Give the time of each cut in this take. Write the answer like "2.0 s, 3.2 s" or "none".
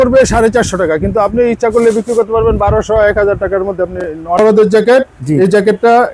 4.4 s